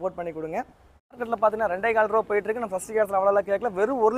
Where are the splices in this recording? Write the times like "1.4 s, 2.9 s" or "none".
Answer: 1.2 s